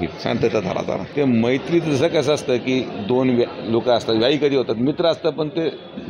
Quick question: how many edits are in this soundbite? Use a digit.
1